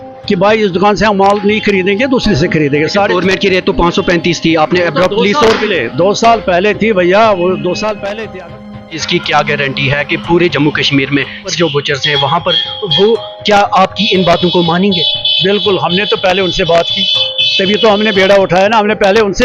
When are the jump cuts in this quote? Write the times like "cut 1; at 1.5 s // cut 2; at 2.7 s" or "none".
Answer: cut 1; at 8.6 s // cut 2; at 11.5 s

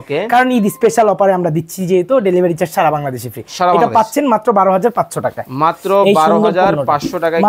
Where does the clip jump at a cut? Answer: none

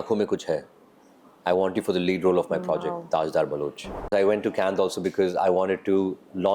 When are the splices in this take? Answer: cut 1; at 4.1 s

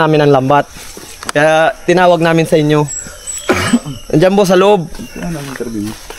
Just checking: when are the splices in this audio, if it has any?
none

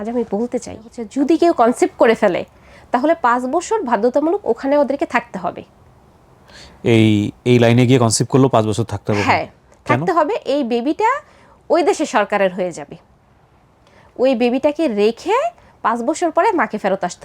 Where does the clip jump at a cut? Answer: cut 1; at 1.0 s

